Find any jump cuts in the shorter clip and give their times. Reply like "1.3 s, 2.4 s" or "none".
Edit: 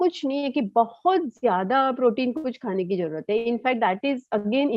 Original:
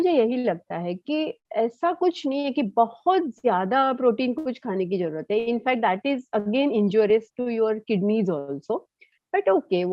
none